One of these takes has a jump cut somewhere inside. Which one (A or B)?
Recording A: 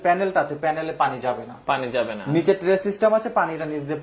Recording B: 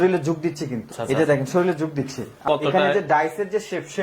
B